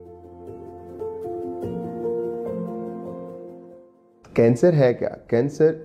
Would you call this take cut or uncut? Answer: cut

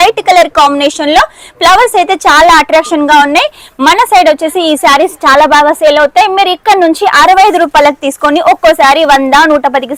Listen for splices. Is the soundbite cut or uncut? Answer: uncut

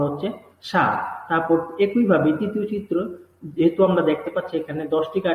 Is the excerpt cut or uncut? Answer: cut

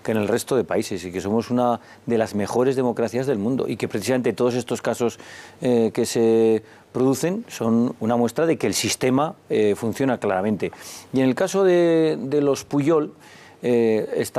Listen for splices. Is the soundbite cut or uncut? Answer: cut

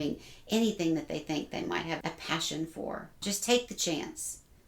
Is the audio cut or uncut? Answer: cut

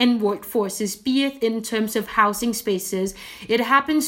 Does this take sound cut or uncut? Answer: uncut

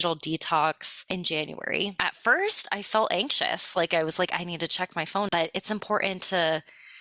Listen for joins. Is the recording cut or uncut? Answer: cut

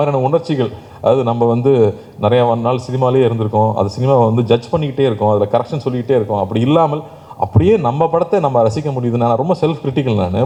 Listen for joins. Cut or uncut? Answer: uncut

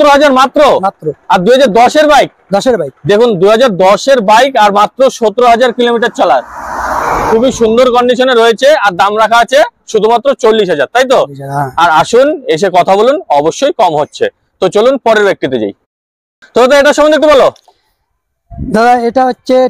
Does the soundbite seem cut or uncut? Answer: uncut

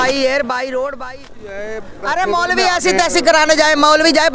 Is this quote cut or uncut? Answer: cut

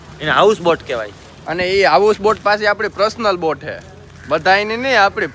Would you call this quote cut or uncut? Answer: uncut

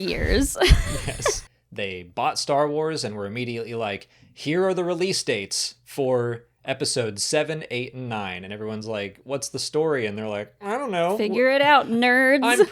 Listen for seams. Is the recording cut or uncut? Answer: cut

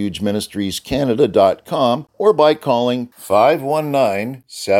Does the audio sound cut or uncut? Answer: cut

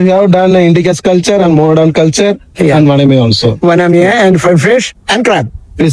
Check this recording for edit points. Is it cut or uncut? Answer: uncut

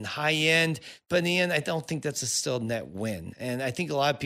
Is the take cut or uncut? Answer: uncut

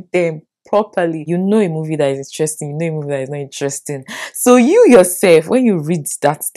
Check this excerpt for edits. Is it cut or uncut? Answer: cut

